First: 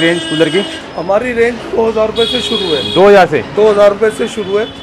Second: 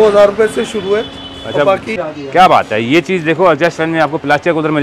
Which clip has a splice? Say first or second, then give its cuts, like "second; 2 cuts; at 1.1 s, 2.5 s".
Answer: second; 1 cut; at 2.1 s